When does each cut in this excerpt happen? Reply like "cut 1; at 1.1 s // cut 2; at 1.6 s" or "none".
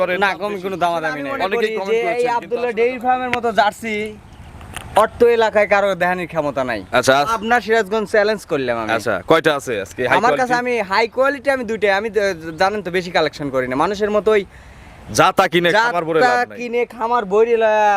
cut 1; at 1.5 s